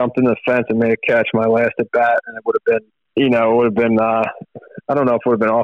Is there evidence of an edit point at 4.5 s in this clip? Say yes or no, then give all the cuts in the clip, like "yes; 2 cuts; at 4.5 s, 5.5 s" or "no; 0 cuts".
no; 1 cut; at 3.0 s